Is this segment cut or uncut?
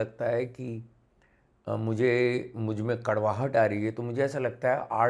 uncut